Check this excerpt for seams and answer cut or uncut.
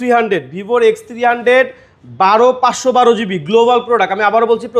uncut